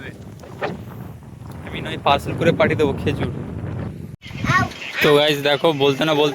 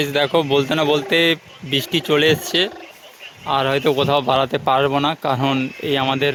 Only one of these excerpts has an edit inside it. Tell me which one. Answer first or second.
first